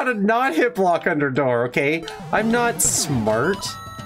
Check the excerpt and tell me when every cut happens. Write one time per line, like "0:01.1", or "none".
none